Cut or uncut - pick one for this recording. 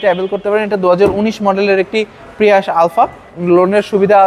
cut